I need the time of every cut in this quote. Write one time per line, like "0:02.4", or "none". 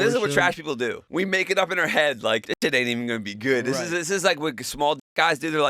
0:01.0
0:02.5